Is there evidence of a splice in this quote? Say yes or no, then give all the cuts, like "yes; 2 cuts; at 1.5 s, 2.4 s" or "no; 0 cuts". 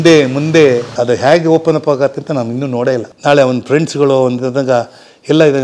yes; 2 cuts; at 0.9 s, 3.1 s